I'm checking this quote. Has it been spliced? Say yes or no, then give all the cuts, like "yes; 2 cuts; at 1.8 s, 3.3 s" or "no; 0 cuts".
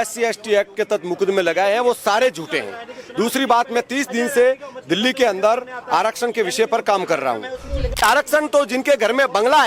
yes; 1 cut; at 8.0 s